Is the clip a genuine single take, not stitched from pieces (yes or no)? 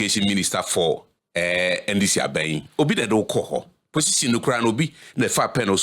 no